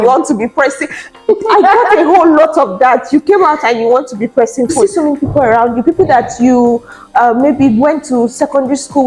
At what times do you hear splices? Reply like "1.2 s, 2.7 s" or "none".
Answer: 4.7 s